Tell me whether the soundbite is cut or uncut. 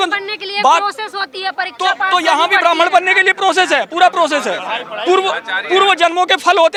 uncut